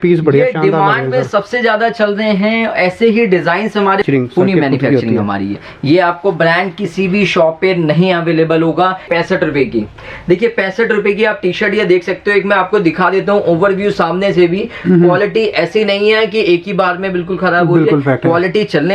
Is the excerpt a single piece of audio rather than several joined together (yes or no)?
no